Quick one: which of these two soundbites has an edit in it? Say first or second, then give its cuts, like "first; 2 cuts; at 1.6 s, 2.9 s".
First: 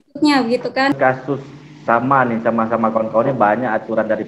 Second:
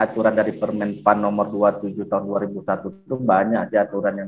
first; 1 cut; at 1.0 s